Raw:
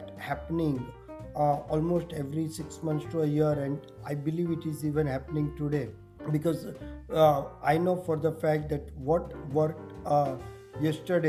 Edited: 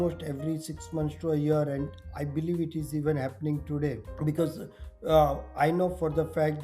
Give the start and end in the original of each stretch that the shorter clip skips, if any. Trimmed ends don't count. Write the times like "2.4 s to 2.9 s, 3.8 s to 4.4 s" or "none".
6.0 s to 6.1 s